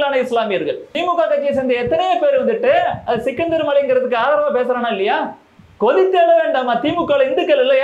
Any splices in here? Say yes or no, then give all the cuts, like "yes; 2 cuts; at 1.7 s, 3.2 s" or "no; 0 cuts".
yes; 1 cut; at 1.0 s